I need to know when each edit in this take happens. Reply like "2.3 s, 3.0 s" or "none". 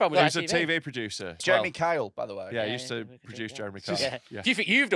1.4 s